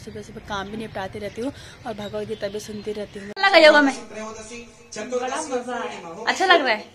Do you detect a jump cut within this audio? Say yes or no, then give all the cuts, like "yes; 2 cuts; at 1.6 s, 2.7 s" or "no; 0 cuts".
yes; 1 cut; at 3.3 s